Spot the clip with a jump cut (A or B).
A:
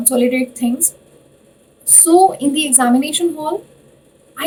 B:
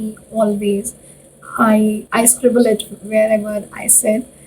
B